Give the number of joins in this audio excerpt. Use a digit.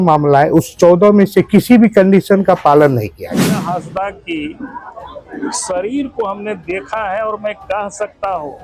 1